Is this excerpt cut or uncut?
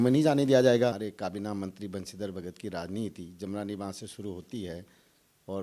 cut